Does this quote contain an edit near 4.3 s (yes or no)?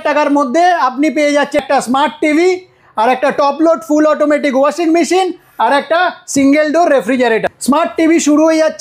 no